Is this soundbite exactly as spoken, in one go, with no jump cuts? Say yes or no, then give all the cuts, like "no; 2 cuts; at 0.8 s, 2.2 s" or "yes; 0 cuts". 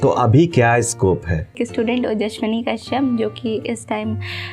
no; 1 cut; at 1.6 s